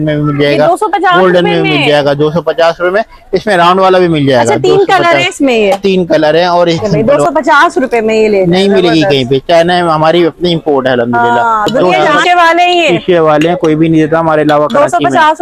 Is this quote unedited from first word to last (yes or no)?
no